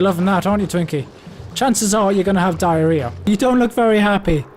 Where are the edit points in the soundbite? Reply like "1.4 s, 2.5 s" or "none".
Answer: 3.3 s